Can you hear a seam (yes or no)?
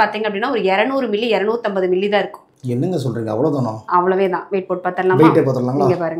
no